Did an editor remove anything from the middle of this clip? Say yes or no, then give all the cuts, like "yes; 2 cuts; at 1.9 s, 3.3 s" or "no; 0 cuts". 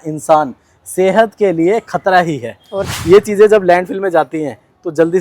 yes; 1 cut; at 2.8 s